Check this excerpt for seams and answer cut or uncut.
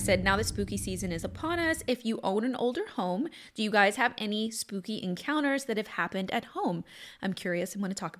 uncut